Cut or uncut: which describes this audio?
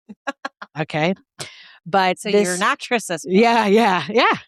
uncut